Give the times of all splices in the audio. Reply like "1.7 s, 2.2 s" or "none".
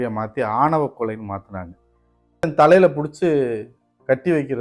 2.4 s